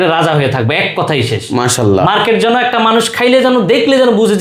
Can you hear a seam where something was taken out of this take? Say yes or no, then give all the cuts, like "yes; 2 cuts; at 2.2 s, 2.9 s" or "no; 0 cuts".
no; 0 cuts